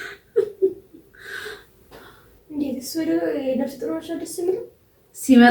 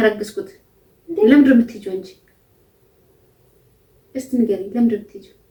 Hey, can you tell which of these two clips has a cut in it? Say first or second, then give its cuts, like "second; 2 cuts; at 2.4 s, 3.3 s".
first; 1 cut; at 2.3 s